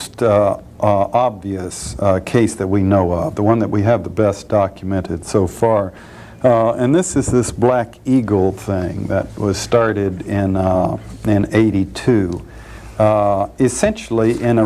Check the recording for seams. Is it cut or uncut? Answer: cut